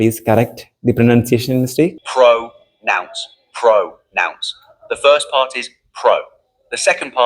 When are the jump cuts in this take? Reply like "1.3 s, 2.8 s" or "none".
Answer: 2.0 s